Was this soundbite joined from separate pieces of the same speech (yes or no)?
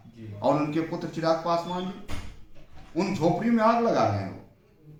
no